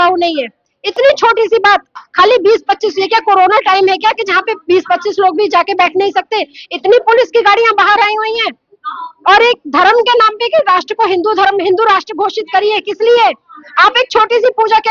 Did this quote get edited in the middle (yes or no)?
no